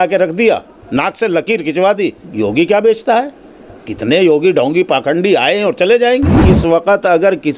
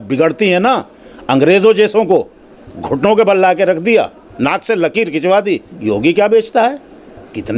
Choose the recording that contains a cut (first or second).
first